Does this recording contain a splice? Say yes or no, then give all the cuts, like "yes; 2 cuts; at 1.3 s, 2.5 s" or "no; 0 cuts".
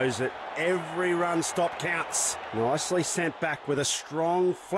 no; 0 cuts